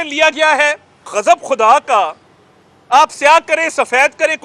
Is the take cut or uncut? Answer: cut